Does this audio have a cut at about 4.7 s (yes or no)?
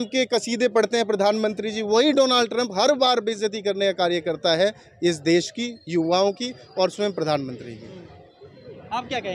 no